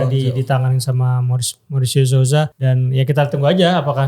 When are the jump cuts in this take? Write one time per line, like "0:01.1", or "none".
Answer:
0:02.6